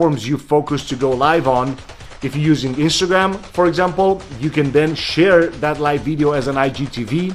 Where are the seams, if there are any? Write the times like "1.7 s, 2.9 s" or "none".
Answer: none